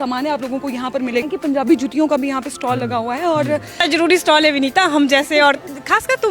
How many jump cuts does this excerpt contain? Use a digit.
2